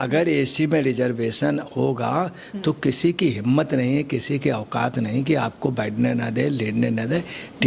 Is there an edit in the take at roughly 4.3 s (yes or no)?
no